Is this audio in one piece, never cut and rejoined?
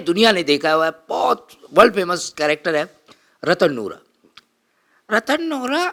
yes; 0 cuts

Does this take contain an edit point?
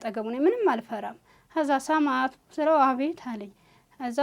no; 0 cuts

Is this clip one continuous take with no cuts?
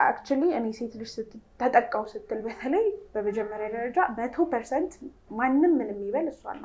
yes; 0 cuts

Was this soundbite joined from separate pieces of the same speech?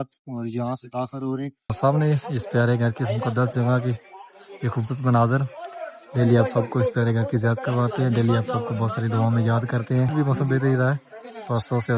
yes; 2 cuts; at 1.8 s, 10.1 s

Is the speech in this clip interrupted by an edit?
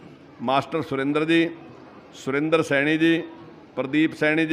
no; 0 cuts

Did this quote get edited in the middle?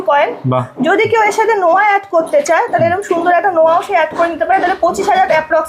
no; 0 cuts

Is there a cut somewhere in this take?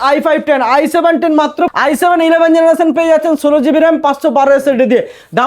yes; 1 cut; at 1.7 s

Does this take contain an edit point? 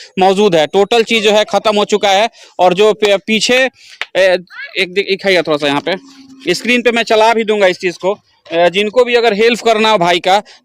no; 0 cuts

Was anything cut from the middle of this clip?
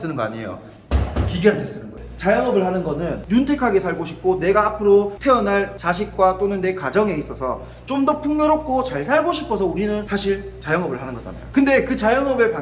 yes; 1 cut; at 1.8 s

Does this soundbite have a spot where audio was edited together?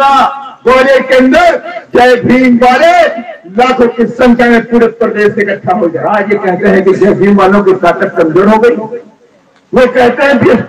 yes; 1 cut; at 6.0 s

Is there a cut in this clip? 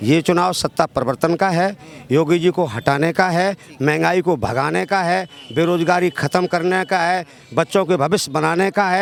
no; 0 cuts

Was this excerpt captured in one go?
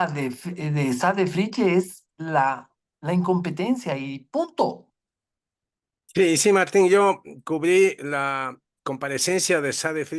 yes; 0 cuts

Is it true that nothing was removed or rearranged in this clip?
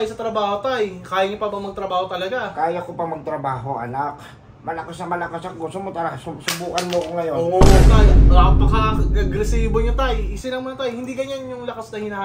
yes; 0 cuts

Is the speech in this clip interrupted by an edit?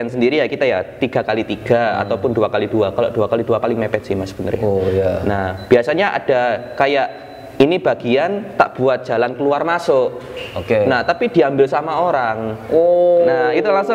no; 0 cuts

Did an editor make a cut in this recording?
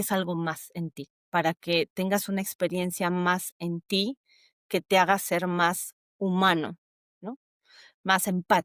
no; 0 cuts

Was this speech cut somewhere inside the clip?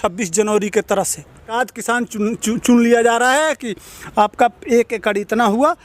yes; 1 cut; at 1.5 s

